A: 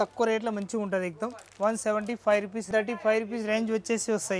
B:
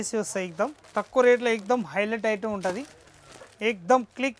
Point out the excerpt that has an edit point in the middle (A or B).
A